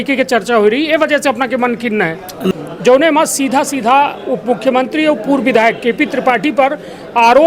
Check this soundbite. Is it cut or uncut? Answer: cut